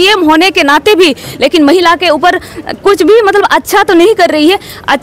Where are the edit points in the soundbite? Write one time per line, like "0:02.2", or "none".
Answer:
none